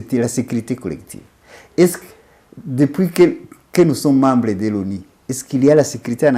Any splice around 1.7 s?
no; 0 cuts

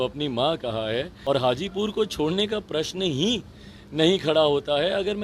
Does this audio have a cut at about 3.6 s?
no; 1 cut; at 1.1 s

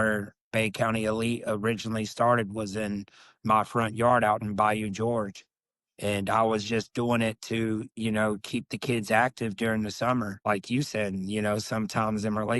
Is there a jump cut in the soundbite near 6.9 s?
no; 1 cut; at 10.3 s

